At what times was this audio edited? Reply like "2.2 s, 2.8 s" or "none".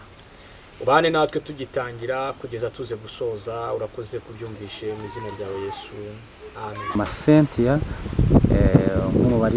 6.9 s